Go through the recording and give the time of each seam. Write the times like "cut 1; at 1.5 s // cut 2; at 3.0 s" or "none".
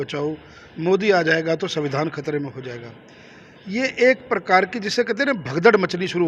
none